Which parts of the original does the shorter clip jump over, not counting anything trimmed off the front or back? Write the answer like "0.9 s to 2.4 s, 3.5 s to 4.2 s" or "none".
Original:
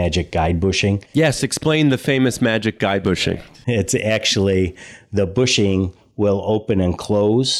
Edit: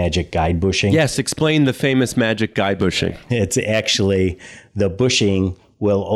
0.9 s to 1.2 s, 3.5 s to 3.6 s